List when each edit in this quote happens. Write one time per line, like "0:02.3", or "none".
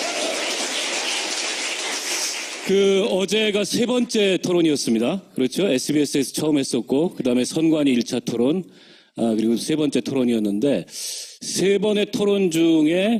none